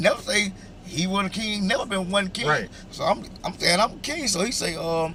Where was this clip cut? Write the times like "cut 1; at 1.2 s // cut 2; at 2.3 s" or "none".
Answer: none